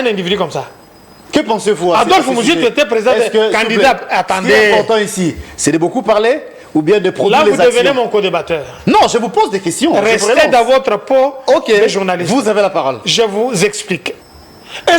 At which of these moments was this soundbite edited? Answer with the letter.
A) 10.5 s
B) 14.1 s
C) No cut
B